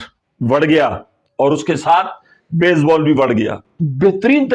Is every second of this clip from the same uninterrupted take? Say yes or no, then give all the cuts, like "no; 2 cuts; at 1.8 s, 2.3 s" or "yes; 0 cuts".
no; 1 cut; at 3.6 s